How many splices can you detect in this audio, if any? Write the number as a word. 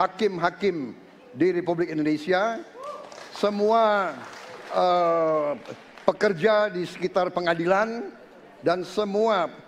zero